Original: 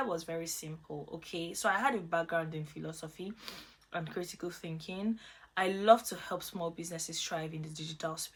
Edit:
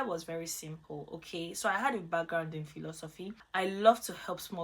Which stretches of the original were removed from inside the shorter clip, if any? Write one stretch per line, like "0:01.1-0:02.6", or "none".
0:03.3-0:05.4

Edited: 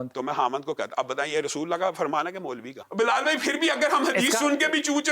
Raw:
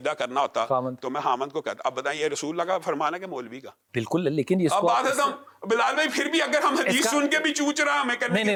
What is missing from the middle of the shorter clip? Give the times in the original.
0:03.6-0:05.5

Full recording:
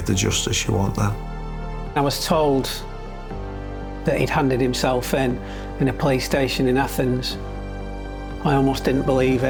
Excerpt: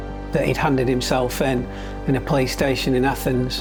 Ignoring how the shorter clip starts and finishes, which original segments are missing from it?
none

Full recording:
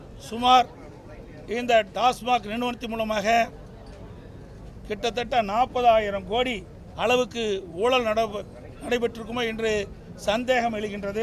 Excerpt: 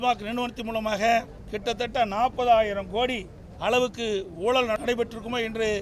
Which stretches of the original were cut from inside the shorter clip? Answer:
0:03.7-0:04.8
0:08.1-0:08.8

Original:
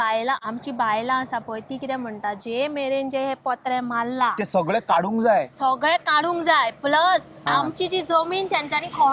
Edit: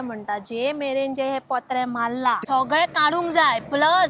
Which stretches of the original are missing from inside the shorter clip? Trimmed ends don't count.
0:04.4-0:05.5

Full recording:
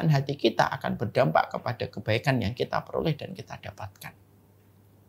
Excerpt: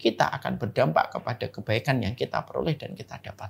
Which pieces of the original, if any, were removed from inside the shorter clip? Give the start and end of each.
none

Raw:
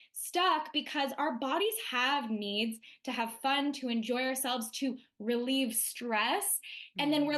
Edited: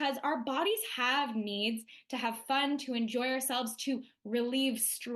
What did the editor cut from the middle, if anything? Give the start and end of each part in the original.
none

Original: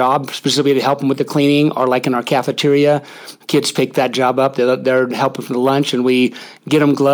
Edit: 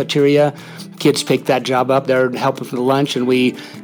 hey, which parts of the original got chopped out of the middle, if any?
0:04.5-0:04.8

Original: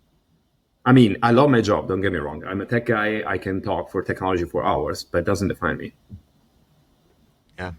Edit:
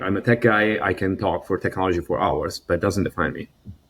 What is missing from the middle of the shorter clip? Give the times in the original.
none

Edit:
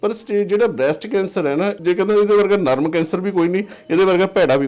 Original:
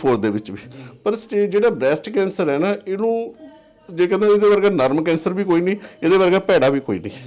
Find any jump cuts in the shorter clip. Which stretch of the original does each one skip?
0:02.8-0:03.9

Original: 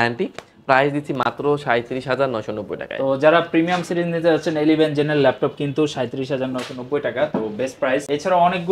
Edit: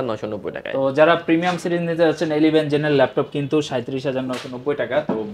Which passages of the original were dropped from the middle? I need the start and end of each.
none

